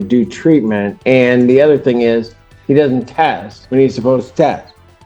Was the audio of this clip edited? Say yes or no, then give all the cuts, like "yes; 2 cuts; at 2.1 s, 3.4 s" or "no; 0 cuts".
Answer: yes; 2 cuts; at 0.9 s, 3.5 s